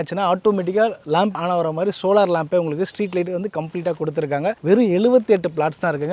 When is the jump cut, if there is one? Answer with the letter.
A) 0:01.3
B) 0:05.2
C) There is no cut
A